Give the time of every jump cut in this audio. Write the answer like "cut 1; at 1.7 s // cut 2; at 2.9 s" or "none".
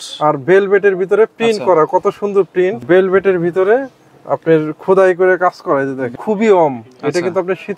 cut 1; at 2.8 s // cut 2; at 6.1 s